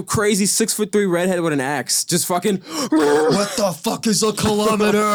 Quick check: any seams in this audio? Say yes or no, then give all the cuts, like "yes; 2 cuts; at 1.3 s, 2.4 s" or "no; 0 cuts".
no; 0 cuts